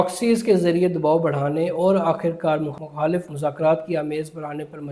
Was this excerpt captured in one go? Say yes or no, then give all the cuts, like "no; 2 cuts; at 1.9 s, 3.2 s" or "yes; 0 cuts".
no; 1 cut; at 3.3 s